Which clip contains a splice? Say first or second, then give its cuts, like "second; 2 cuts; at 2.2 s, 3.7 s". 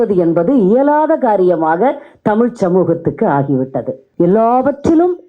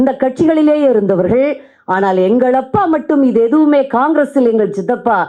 first; 1 cut; at 4.0 s